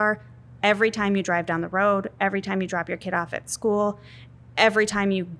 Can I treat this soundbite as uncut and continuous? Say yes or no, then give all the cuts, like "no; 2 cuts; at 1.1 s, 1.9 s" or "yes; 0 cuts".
yes; 0 cuts